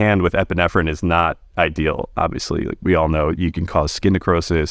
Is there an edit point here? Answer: no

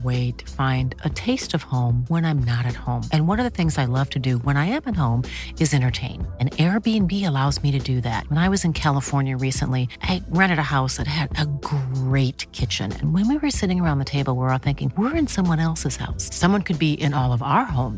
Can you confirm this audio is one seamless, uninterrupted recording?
yes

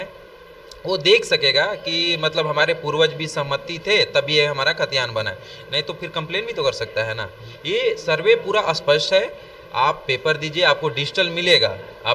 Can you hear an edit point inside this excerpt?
no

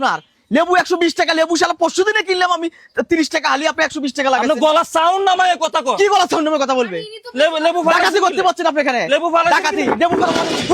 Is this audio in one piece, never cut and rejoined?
yes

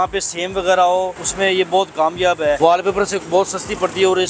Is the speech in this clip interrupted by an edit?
yes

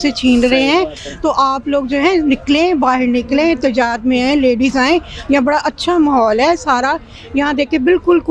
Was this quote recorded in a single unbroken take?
yes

